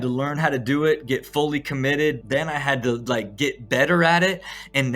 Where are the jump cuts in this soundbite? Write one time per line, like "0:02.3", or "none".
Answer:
0:02.2